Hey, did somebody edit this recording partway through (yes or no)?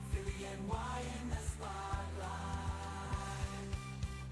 no